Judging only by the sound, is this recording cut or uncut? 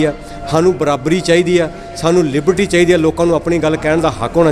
uncut